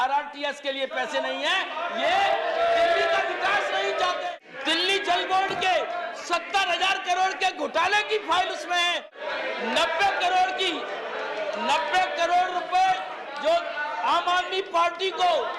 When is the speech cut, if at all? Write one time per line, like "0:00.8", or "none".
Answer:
0:04.2
0:09.1